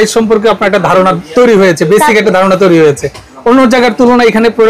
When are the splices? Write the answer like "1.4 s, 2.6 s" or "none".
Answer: none